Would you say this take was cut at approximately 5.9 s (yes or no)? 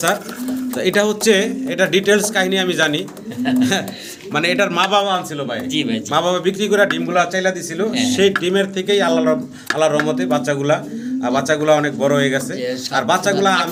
no